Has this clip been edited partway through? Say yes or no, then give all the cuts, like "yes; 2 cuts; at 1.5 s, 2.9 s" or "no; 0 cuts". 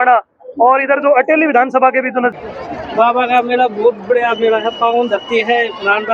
yes; 1 cut; at 2.4 s